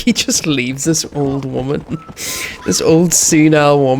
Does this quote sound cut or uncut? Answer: uncut